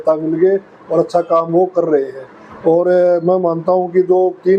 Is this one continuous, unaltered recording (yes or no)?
yes